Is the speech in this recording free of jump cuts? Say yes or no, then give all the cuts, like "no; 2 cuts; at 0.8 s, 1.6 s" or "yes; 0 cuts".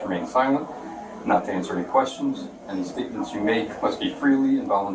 yes; 0 cuts